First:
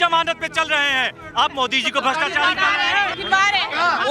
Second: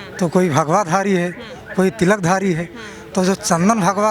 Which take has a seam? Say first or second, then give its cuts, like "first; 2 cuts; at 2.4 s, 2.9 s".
first; 1 cut; at 3.2 s